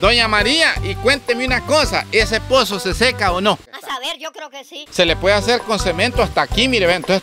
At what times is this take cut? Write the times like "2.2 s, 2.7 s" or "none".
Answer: 4.8 s